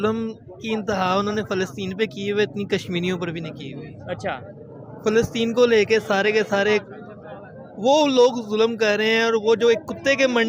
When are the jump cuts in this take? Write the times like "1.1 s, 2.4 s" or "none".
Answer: none